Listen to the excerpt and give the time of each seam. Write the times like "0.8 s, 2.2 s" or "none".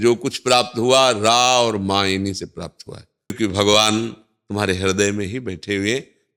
3.3 s